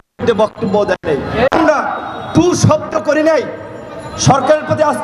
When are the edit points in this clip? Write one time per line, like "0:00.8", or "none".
0:01.5